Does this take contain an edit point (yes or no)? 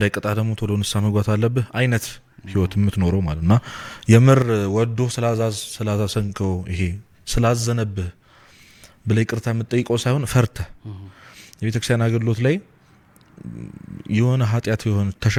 no